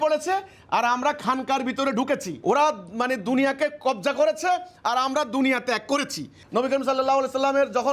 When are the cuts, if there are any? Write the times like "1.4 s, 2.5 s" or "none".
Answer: 2.3 s, 6.4 s